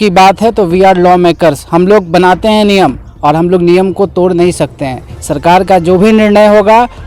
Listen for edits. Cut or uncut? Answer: uncut